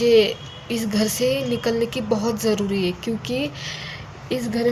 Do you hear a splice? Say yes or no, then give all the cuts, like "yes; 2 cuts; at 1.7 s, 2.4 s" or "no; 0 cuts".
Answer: no; 0 cuts